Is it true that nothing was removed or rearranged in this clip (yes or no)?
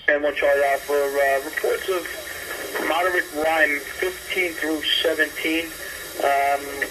yes